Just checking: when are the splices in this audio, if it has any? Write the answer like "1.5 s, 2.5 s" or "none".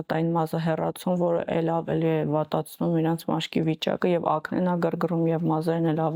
none